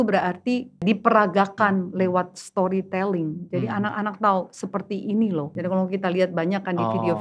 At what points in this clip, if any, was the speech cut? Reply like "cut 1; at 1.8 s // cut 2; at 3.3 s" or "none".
cut 1; at 0.8 s // cut 2; at 5.5 s

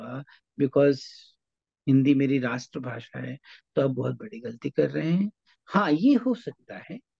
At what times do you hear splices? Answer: none

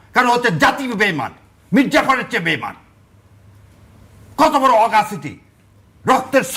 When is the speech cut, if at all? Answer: none

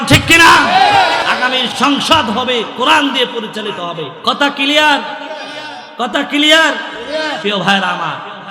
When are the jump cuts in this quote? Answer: cut 1; at 1.3 s // cut 2; at 4.1 s // cut 3; at 7.4 s

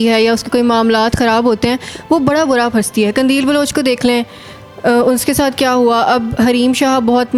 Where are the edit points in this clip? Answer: none

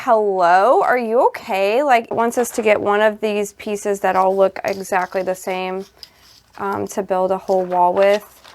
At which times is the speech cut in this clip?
cut 1; at 2.1 s

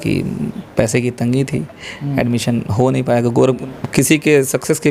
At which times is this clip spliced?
cut 1; at 3.6 s

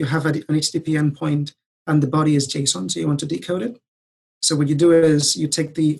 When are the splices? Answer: none

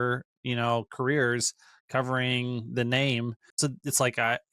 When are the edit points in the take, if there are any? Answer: cut 1; at 3.4 s

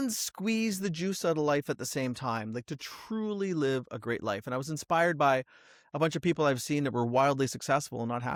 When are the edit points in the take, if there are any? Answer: none

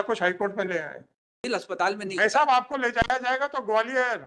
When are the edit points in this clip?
cut 1; at 1.5 s

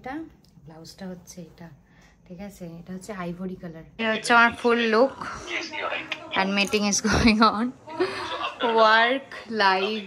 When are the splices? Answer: cut 1; at 4.0 s

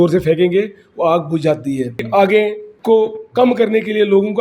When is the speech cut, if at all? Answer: cut 1; at 2.1 s // cut 2; at 2.7 s

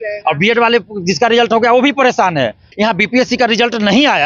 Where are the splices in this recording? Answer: cut 1; at 2.6 s

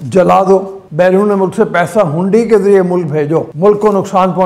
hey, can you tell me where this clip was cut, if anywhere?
cut 1; at 3.5 s

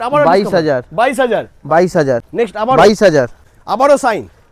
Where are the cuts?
cut 1; at 2.2 s // cut 2; at 3.4 s

